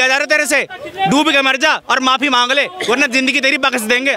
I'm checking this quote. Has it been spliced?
no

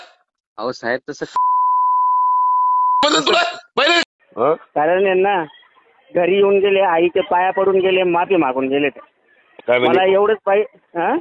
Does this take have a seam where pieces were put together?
yes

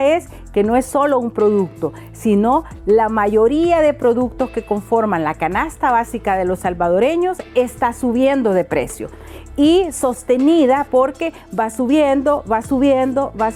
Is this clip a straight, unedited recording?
yes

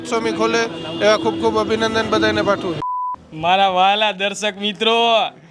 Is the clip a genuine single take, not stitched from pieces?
no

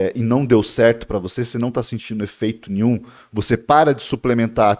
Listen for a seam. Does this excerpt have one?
no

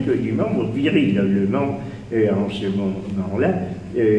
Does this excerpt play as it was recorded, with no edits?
no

